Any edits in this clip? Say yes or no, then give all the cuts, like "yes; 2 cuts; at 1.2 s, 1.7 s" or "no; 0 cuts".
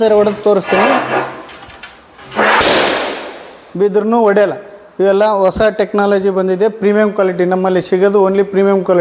no; 0 cuts